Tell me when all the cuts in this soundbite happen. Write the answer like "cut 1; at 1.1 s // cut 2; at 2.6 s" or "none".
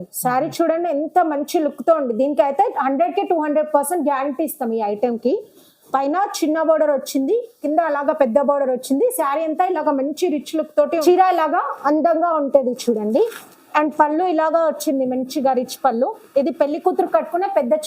cut 1; at 11.0 s